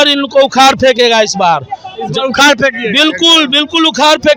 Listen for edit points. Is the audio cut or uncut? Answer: uncut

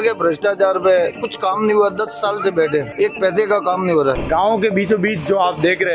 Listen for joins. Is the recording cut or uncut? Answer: cut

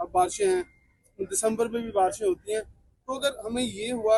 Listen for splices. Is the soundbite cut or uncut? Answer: uncut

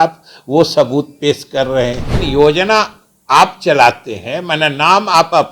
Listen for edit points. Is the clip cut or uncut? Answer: cut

